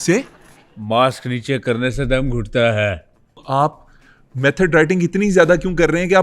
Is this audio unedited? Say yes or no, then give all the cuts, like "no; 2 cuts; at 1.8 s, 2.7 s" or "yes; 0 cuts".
no; 1 cut; at 3.4 s